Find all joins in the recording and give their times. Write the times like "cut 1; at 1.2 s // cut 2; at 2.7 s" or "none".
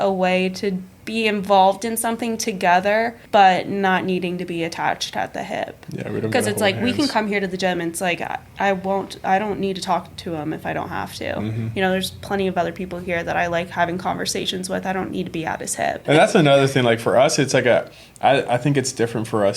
cut 1; at 0.9 s // cut 2; at 3.2 s // cut 3; at 16.0 s